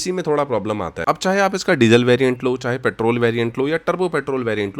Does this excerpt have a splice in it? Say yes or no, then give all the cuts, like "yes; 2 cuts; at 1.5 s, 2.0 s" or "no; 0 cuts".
yes; 1 cut; at 1.0 s